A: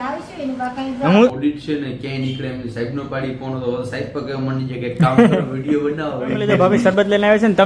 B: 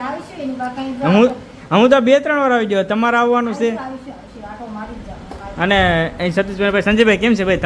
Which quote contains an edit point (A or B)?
A